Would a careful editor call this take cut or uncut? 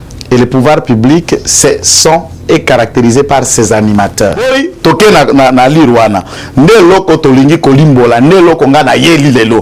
cut